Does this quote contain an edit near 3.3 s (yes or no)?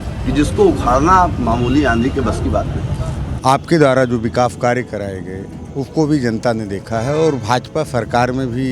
yes